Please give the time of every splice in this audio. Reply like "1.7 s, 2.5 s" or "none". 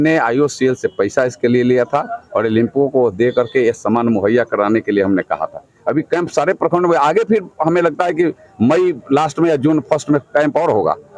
none